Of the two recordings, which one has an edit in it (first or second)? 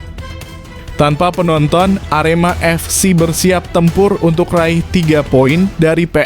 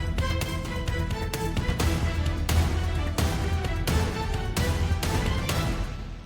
first